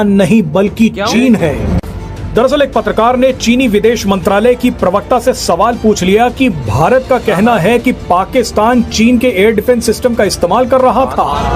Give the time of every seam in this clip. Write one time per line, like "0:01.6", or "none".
none